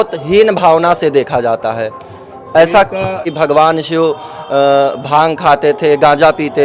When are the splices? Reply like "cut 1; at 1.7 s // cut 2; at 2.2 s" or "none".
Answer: cut 1; at 3.3 s